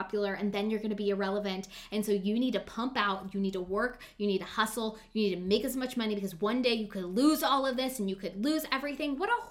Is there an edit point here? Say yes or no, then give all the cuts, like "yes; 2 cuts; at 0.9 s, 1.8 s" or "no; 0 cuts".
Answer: no; 0 cuts